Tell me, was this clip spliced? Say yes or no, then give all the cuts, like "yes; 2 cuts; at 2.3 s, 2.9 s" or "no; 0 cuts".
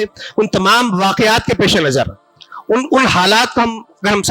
no; 0 cuts